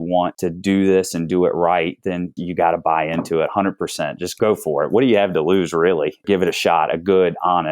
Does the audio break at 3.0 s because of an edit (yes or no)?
no